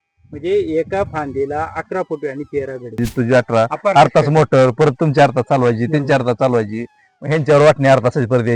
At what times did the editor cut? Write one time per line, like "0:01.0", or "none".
0:03.0